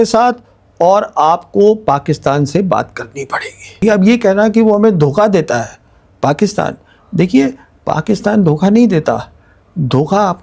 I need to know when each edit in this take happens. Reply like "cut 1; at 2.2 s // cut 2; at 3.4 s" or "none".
cut 1; at 3.8 s